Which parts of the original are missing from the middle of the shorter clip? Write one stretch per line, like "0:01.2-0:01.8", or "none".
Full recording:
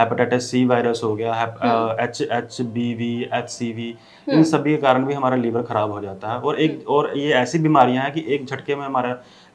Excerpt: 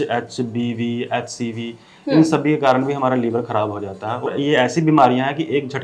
0:06.5-0:07.0